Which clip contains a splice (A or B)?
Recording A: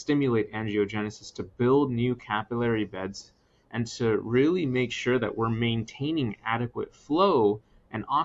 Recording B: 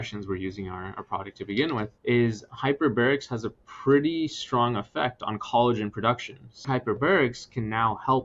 B